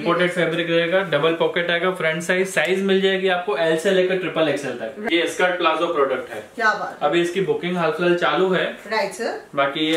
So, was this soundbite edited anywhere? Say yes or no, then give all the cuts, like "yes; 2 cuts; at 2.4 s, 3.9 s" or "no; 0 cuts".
yes; 1 cut; at 5.0 s